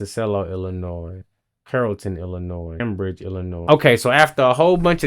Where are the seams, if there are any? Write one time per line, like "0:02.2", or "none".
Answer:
0:01.3
0:03.6